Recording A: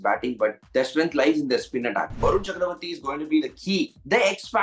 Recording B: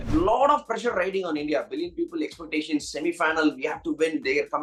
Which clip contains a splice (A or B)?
A